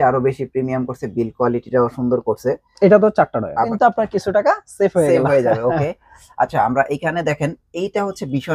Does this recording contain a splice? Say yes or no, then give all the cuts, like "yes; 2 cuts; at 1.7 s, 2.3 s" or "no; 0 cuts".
yes; 1 cut; at 3.7 s